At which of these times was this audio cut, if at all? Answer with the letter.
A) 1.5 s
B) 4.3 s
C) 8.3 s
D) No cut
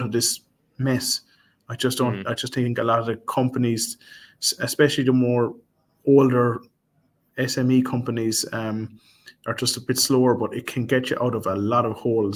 D